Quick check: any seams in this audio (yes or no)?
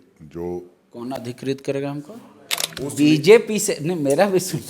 yes